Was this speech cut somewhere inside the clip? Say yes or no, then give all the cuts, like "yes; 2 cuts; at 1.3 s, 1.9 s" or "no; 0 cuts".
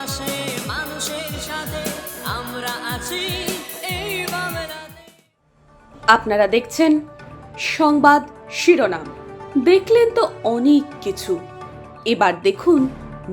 no; 0 cuts